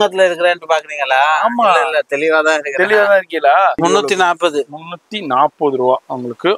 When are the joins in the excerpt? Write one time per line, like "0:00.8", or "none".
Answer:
0:03.8